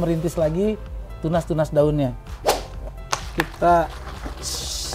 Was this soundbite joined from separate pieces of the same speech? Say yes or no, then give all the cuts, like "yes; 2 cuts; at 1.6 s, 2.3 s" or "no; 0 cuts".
yes; 1 cut; at 2.7 s